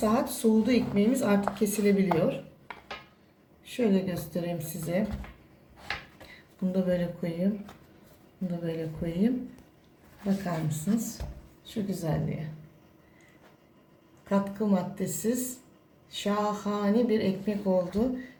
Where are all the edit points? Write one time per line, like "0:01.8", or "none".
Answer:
none